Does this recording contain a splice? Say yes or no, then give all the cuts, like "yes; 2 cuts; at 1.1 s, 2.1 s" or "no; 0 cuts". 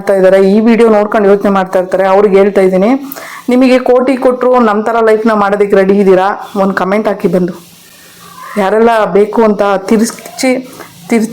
no; 0 cuts